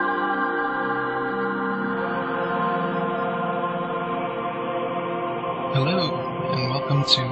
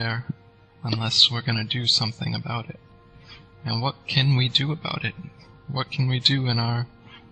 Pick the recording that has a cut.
second; 1 cut; at 4.8 s

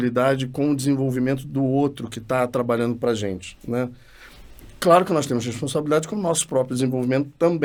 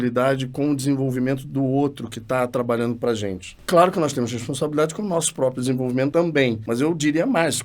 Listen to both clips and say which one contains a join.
second; 2 cuts; at 3.5 s, 6.3 s

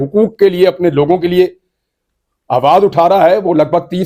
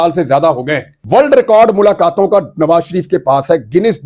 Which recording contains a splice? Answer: second; 1 cut; at 0.9 s

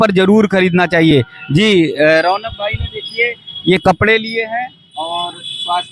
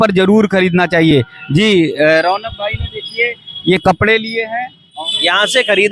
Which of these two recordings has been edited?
second; 1 cut; at 5.0 s

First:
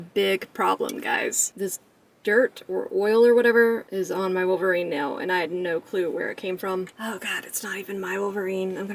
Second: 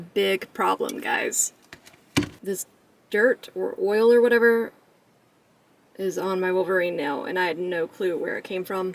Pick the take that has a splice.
first; 3 cuts; at 1.5 s, 3.9 s, 6.9 s

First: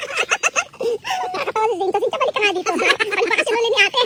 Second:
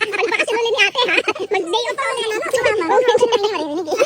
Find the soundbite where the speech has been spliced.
second; 1 cut; at 2.0 s

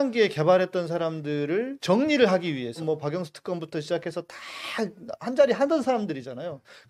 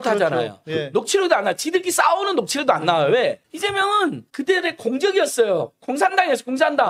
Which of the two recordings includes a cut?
first; 2 cuts; at 1.7 s, 2.8 s

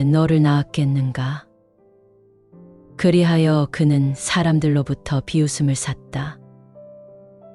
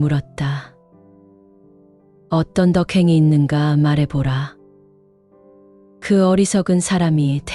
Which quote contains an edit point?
first; 1 cut; at 6.6 s

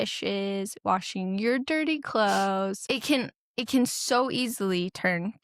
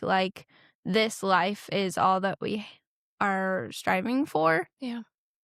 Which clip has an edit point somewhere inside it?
first; 1 cut; at 2.8 s

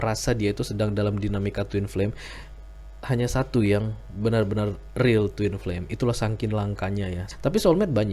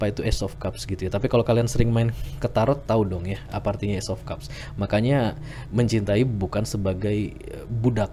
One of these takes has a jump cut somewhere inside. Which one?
first; 1 cut; at 7.2 s

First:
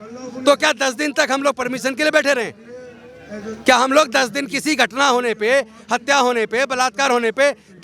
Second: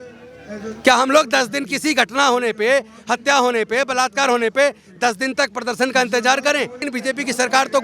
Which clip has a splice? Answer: second; 1 cut; at 6.8 s

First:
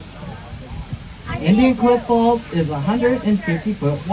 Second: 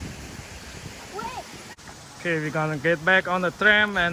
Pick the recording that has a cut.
second; 1 cut; at 1.7 s

